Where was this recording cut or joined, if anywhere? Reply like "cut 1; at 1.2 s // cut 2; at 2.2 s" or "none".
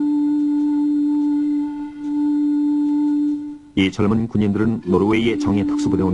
none